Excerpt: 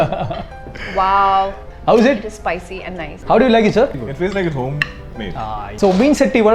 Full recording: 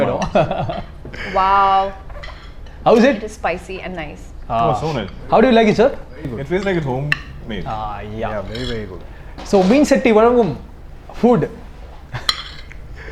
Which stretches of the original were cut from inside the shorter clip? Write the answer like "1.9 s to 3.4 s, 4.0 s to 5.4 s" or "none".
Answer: 2.0 s to 2.6 s, 4.1 s to 5.1 s, 6.1 s to 6.3 s, 8.0 s to 9.4 s